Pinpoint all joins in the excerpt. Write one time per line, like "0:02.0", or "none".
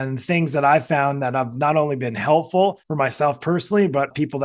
0:02.8